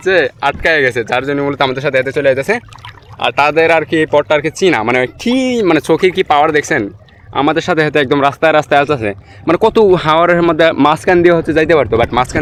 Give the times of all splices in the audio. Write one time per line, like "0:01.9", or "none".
none